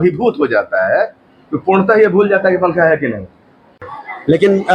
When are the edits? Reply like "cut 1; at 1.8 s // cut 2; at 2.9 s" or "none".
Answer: cut 1; at 3.7 s